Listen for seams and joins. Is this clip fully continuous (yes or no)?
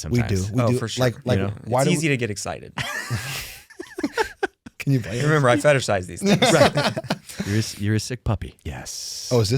no